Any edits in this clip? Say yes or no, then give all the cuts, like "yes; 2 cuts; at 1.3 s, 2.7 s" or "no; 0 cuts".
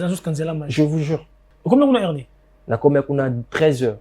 yes; 1 cut; at 1.5 s